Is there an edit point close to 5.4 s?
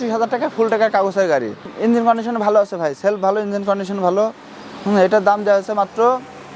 no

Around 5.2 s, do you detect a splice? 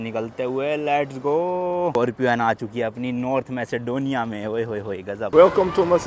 yes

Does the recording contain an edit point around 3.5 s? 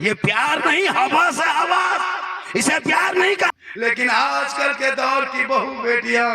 yes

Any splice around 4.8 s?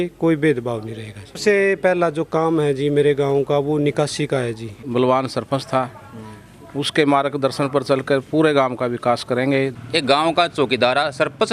yes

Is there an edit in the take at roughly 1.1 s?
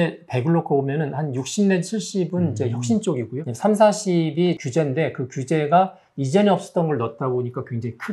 no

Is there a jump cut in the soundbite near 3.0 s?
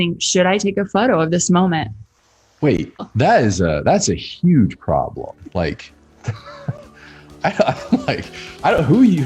yes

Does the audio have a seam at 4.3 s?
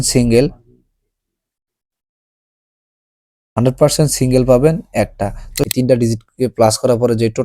no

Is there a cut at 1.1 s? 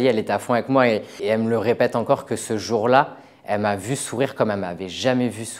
yes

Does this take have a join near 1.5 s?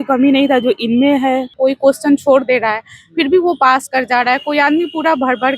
yes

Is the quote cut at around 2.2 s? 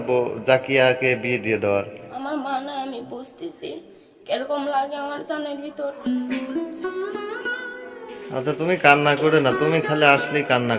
yes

